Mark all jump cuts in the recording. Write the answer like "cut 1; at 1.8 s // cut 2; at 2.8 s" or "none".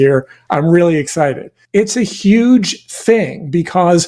cut 1; at 1.5 s